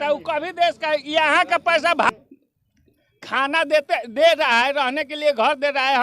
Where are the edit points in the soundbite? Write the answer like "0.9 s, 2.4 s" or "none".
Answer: 2.1 s